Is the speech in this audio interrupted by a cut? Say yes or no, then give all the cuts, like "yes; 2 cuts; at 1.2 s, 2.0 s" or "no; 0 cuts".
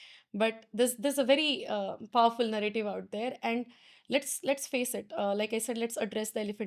no; 0 cuts